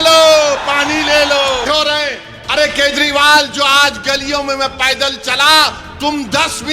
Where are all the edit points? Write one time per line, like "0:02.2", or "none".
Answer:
0:01.6